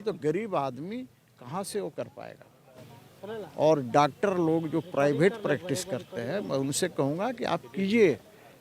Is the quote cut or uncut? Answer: uncut